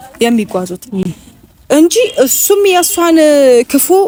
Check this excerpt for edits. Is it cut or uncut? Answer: uncut